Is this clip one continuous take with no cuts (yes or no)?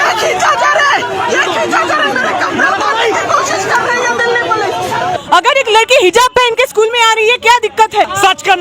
no